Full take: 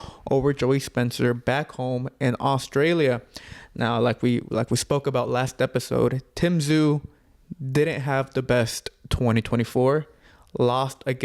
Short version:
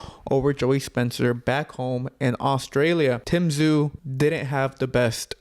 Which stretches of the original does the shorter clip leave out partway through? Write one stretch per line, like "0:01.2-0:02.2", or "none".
0:03.2-0:06.3
0:07.1-0:07.6